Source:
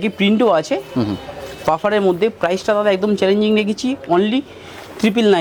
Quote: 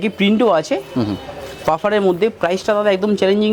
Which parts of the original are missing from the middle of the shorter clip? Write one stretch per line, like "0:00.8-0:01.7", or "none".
none